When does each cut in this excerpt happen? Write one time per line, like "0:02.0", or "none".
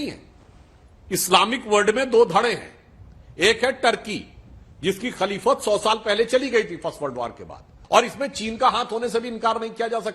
0:07.7